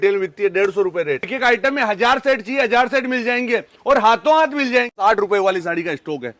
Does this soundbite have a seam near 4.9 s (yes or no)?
yes